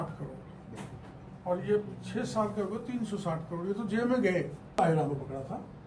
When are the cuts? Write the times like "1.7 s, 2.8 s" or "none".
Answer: 4.8 s